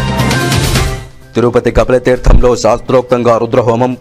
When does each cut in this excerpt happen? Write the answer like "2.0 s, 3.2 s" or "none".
1.1 s